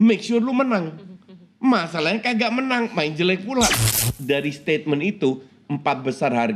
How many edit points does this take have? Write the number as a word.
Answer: one